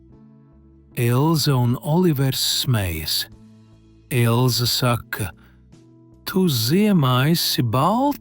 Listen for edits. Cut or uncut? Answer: cut